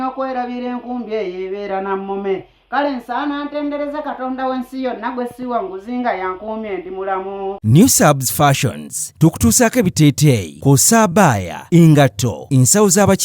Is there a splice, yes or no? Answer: yes